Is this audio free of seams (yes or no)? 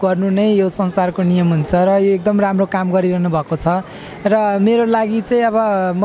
yes